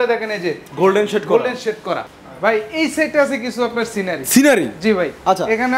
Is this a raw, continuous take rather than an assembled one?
no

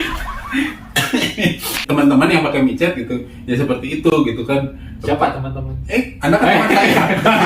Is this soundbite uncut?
no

